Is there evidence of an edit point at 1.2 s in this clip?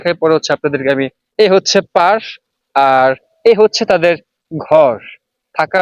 yes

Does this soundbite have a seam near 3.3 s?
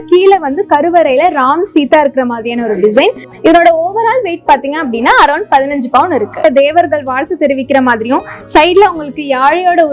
yes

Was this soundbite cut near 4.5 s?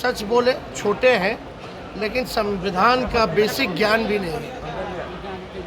no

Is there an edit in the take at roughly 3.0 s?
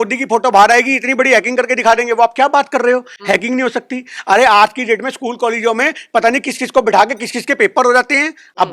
no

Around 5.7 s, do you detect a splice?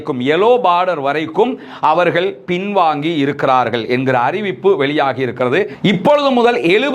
yes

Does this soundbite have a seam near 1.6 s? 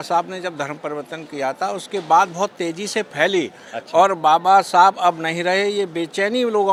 no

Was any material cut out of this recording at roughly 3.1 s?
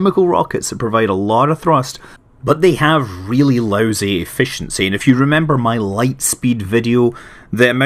yes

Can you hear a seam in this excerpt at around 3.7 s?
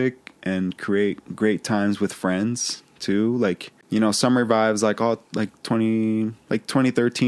yes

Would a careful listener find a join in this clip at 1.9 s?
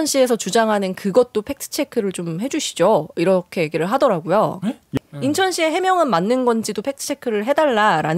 no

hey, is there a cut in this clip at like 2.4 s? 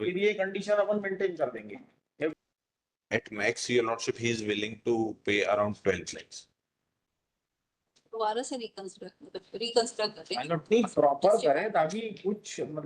yes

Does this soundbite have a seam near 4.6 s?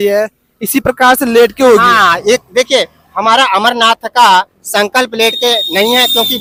no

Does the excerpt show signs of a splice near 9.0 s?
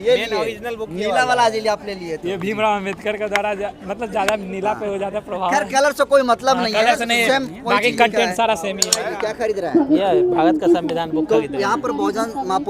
yes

